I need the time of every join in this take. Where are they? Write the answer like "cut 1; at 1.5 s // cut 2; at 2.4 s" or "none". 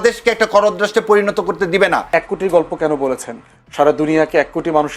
cut 1; at 2.1 s